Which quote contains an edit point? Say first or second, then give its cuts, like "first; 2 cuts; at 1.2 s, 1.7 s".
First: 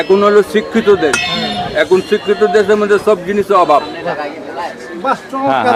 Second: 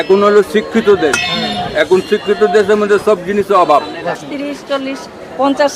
second; 1 cut; at 4.2 s